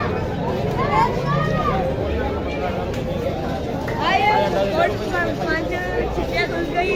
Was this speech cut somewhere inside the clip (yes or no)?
no